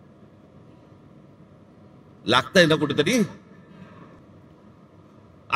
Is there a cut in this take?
yes; 1 cut; at 4.2 s

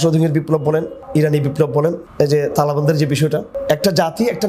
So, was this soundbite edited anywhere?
yes; 3 cuts; at 1.0 s, 2.0 s, 3.5 s

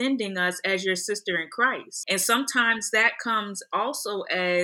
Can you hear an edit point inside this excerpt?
yes; 1 cut; at 1.9 s

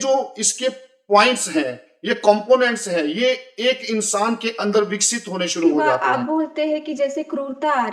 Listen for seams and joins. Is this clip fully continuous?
no; 1 cut; at 6.0 s

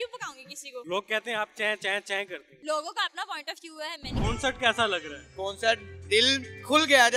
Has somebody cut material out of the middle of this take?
yes; 3 cuts; at 0.8 s, 2.5 s, 4.1 s

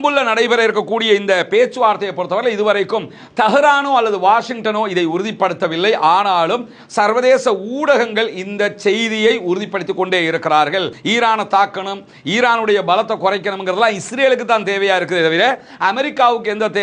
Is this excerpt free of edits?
no; 1 cut; at 11.0 s

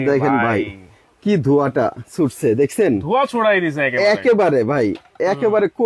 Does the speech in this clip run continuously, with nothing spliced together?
yes; 0 cuts

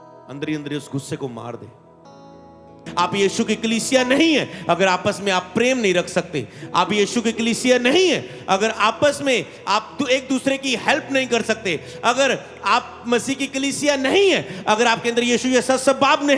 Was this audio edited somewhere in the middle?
yes; 1 cut; at 2.8 s

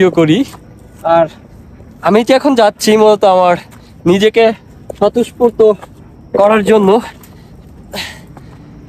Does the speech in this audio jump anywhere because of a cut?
no; 0 cuts

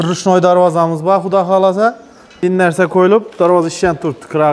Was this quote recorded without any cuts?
no; 1 cut; at 2.4 s

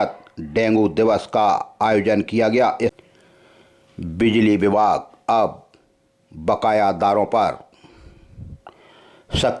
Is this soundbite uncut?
no; 1 cut; at 3.0 s

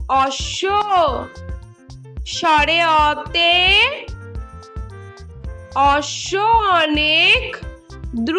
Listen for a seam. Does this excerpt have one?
yes; 2 cuts; at 4.1 s, 5.7 s

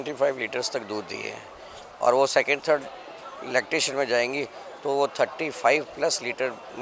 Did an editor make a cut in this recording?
no; 0 cuts

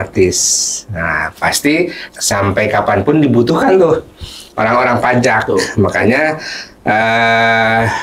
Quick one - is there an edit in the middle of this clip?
yes; 1 cut; at 2.0 s

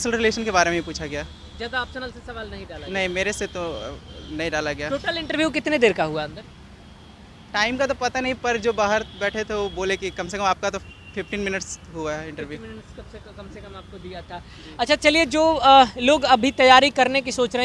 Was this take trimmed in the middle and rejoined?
no; 0 cuts

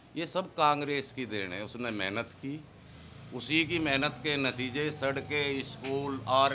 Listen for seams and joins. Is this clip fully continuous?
yes; 0 cuts

